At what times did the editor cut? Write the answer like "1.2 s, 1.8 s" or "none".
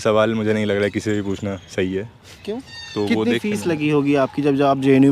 2.8 s

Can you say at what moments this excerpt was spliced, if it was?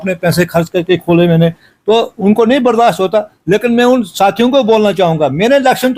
none

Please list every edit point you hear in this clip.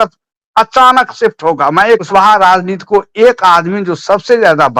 2.0 s

